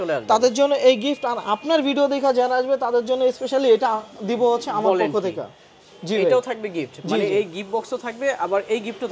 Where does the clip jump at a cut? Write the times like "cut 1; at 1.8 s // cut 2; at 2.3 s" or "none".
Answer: none